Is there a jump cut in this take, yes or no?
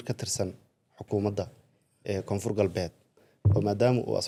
no